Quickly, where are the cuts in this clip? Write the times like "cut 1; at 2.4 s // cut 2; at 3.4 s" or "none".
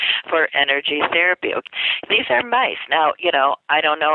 cut 1; at 1.7 s

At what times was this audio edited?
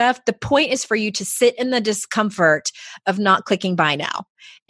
none

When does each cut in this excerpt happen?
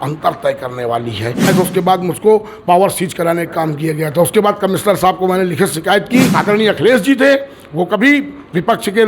cut 1; at 1.5 s // cut 2; at 6.3 s

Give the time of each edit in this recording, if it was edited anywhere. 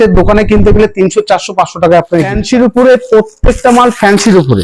cut 1; at 2.4 s

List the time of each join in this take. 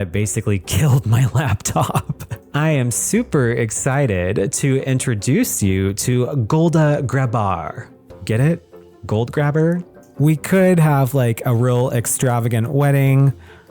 cut 1; at 2.4 s // cut 2; at 9.9 s

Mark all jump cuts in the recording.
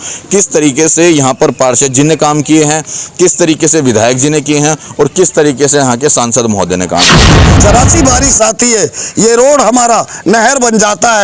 cut 1; at 7.4 s

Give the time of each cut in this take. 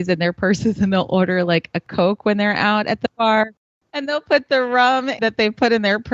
cut 1; at 1.9 s // cut 2; at 3.6 s // cut 3; at 5.2 s

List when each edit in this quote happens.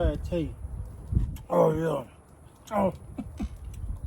cut 1; at 1.3 s

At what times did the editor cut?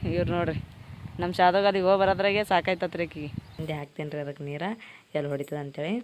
cut 1; at 3.6 s

